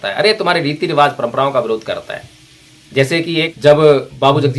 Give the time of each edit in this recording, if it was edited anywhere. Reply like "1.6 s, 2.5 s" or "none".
3.5 s